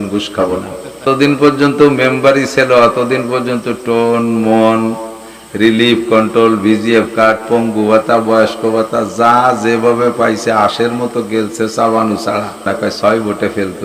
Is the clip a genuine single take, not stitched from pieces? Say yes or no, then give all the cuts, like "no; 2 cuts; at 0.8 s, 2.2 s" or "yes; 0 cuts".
no; 2 cuts; at 1.0 s, 12.7 s